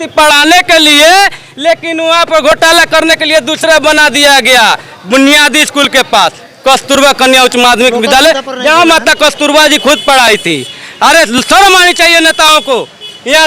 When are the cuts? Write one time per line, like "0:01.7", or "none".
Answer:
none